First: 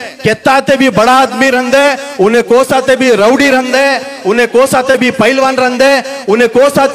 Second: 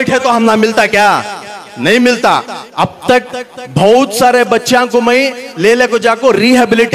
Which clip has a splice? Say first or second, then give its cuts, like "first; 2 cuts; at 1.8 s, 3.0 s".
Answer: second; 1 cut; at 2.6 s